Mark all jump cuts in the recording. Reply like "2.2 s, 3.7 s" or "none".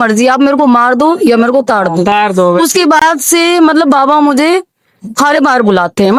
none